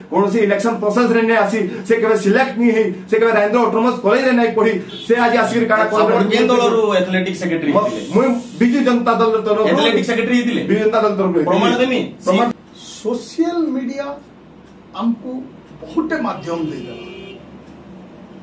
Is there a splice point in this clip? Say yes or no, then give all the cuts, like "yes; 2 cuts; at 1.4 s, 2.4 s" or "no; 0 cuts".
yes; 1 cut; at 12.5 s